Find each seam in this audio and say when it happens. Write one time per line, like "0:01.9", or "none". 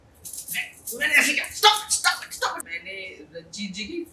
0:02.7